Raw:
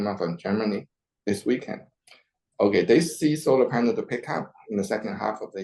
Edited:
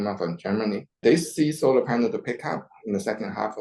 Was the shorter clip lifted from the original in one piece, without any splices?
no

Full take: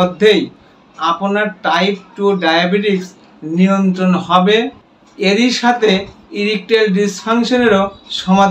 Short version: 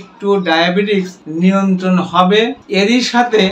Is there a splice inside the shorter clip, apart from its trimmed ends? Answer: yes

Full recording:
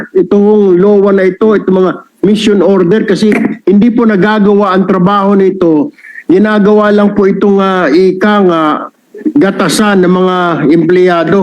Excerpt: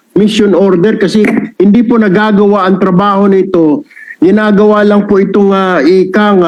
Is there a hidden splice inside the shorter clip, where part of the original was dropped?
no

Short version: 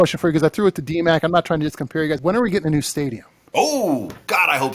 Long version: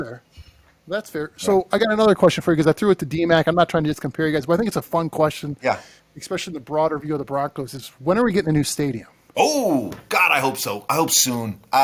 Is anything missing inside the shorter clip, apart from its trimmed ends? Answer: yes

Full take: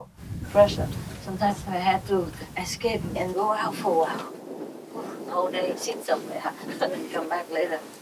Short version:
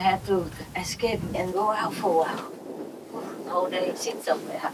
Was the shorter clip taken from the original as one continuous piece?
yes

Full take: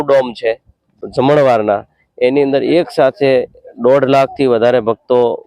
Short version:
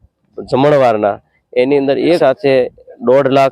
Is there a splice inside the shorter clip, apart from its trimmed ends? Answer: yes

